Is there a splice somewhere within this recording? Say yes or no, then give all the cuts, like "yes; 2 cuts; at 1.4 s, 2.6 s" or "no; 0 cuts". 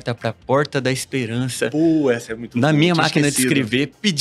no; 0 cuts